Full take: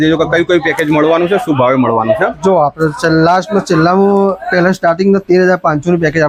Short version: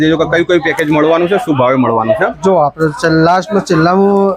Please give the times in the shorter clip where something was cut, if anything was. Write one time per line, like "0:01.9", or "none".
none